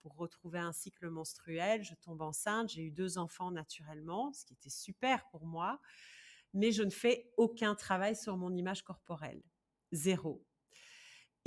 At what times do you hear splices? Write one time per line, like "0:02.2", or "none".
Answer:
none